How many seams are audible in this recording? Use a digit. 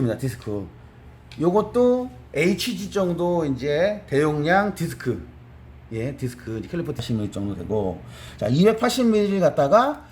1